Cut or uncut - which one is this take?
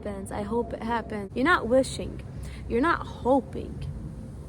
cut